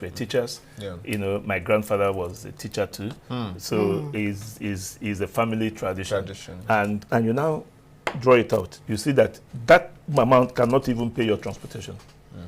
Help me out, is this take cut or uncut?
cut